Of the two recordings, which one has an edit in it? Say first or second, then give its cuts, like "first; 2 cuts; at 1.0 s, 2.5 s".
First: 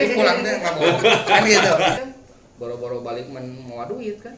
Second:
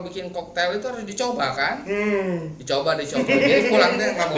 first; 1 cut; at 2.1 s